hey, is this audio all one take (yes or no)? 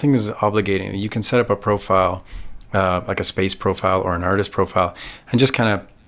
yes